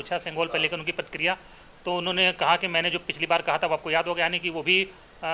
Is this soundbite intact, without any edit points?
yes; 0 cuts

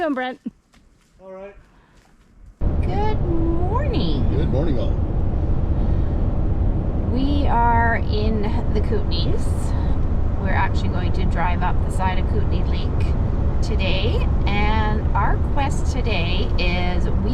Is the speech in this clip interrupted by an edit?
yes; 1 cut; at 2.6 s

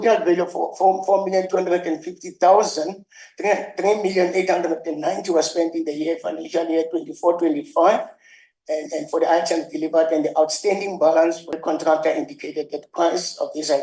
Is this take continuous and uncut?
no; 1 cut; at 11.6 s

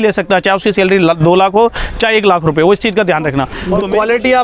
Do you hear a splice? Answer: yes; 1 cut; at 3.5 s

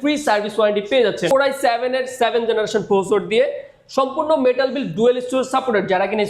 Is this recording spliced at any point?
yes; 1 cut; at 1.3 s

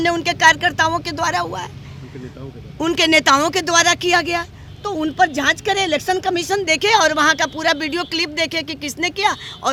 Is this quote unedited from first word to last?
yes; 0 cuts

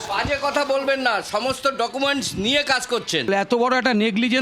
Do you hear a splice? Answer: yes; 1 cut; at 3.3 s

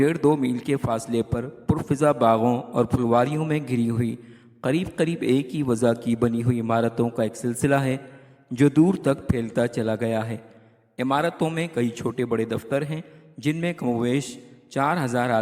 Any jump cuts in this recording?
yes; 1 cut; at 10.6 s

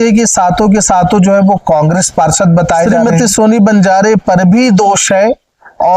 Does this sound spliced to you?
yes; 1 cut; at 3.0 s

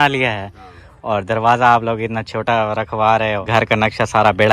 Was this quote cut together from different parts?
yes; 1 cut; at 3.4 s

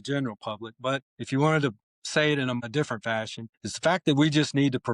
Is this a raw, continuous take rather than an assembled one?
no; 2 cuts; at 1.1 s, 3.0 s

